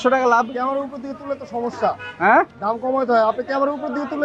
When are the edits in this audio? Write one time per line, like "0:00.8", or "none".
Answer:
none

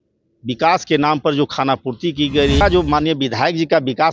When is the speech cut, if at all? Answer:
0:02.6

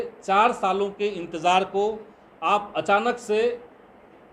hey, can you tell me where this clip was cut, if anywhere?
none

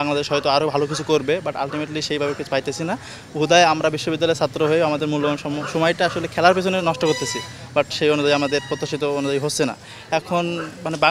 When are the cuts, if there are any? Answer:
none

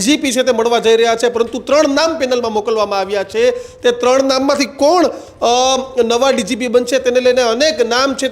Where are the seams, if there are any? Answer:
none

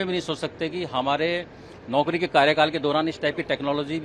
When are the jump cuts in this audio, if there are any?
none

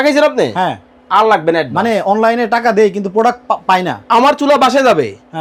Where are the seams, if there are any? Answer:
none

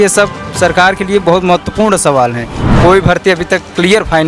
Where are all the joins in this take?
0:02.5

